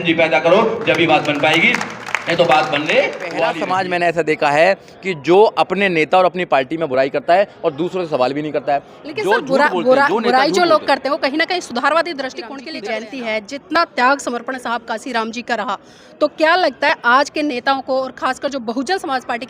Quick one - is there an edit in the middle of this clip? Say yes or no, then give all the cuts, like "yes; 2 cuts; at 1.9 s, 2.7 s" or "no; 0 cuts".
yes; 2 cuts; at 3.4 s, 12.6 s